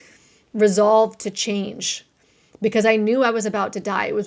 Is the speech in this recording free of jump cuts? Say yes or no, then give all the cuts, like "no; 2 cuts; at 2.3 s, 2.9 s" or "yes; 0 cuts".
yes; 0 cuts